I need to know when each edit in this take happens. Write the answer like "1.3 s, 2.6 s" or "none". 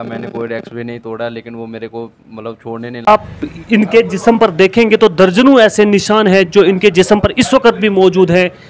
3.1 s